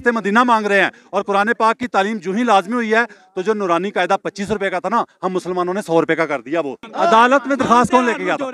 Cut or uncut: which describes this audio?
cut